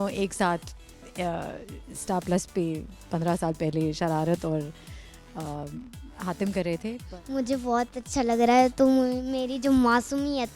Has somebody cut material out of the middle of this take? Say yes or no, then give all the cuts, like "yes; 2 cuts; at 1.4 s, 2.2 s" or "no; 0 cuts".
yes; 1 cut; at 7.1 s